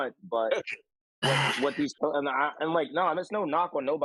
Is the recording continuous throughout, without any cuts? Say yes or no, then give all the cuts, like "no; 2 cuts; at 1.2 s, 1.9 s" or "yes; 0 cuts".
yes; 0 cuts